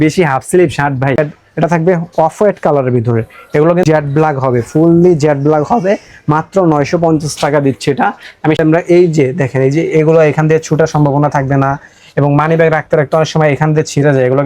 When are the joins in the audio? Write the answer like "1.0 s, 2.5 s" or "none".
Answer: 1.2 s, 3.8 s, 8.6 s